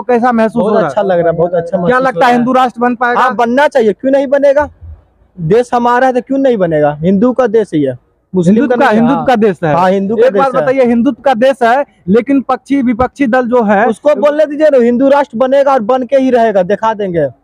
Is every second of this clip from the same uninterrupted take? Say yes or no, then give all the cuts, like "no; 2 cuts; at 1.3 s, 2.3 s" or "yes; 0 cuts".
yes; 0 cuts